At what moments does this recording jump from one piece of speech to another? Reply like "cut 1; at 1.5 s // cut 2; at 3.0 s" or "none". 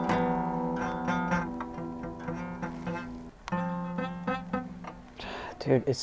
cut 1; at 3.3 s